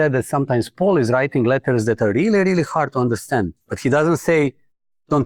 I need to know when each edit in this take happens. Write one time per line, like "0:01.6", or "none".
none